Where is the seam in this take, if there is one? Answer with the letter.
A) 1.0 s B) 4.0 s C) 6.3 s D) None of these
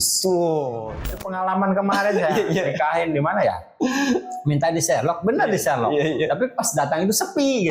A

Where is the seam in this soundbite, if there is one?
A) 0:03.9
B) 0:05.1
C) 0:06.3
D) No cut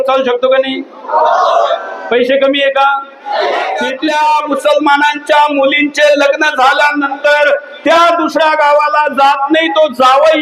A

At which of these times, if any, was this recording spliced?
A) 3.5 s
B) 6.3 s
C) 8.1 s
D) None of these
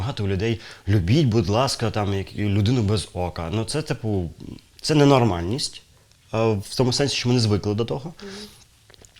D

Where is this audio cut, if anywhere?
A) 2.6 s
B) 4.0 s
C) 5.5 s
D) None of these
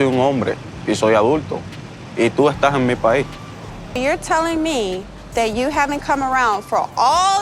B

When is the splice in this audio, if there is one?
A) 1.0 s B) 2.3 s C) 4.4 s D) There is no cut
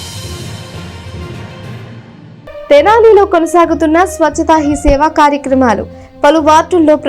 B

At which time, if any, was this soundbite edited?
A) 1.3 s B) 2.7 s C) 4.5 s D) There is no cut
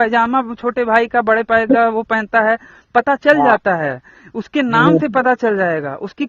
D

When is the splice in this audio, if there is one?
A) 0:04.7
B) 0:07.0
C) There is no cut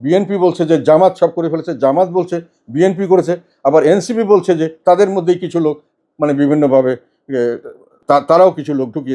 C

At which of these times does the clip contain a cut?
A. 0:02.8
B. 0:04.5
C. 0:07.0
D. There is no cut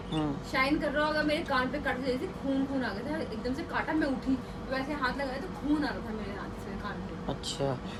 D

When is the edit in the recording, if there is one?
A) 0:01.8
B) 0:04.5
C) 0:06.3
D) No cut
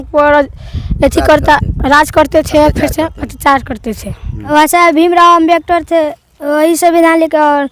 B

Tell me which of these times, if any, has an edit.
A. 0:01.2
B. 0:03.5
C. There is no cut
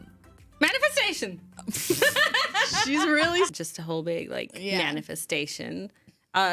B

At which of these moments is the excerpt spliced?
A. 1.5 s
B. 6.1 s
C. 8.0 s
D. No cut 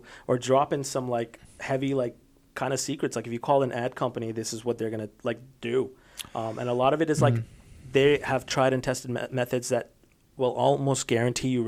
D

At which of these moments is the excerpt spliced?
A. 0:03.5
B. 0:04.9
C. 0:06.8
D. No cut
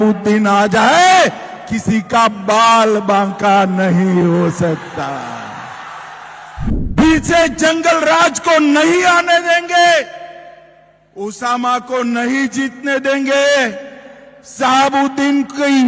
C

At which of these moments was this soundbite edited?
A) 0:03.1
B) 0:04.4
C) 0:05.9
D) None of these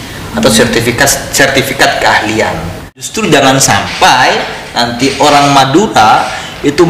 A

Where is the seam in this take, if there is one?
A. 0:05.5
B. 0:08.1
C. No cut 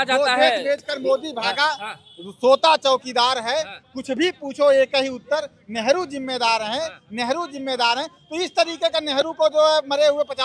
C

